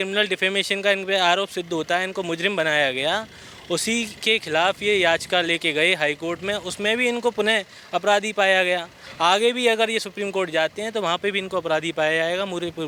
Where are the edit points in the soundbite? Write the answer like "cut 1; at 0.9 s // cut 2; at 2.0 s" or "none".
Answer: none